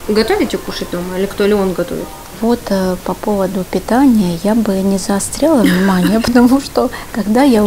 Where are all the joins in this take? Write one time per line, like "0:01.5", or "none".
none

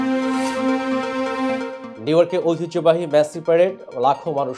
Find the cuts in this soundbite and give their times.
0:01.8

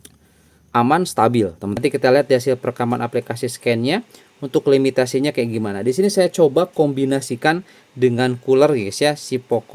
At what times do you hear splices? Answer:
0:01.6

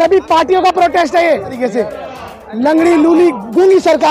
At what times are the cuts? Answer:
0:01.6

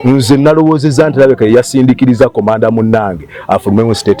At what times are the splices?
none

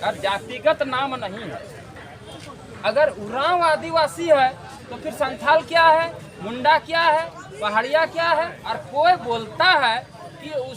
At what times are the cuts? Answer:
0:02.3
0:08.8

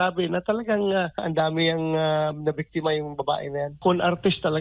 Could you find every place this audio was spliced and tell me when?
0:01.2
0:03.8

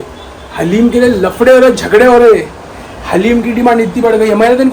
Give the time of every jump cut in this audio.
none

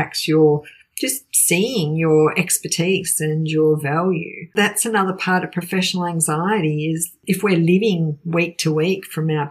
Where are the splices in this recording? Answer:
0:04.5
0:07.1

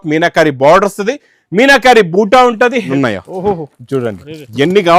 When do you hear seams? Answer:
0:02.9

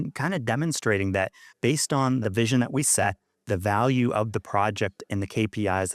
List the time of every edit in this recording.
0:02.3

